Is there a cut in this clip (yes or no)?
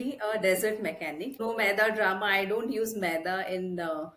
yes